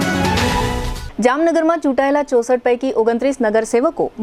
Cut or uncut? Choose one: cut